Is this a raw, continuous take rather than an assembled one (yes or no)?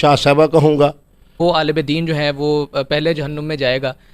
no